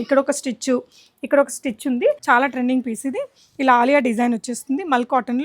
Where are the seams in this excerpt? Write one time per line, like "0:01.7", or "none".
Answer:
0:02.2